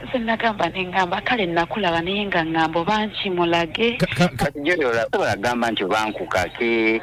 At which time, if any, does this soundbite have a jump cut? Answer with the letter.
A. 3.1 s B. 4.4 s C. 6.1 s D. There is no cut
B